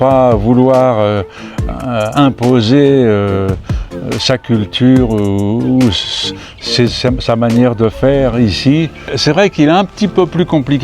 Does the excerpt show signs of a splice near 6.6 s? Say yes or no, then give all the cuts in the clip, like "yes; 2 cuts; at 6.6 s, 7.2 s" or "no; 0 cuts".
no; 1 cut; at 9.0 s